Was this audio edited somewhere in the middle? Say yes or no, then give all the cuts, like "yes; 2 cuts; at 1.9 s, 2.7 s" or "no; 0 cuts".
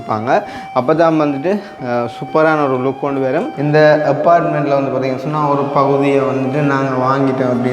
yes; 1 cut; at 3.6 s